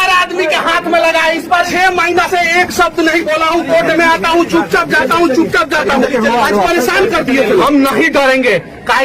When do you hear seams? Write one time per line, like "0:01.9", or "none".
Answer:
0:01.7
0:07.6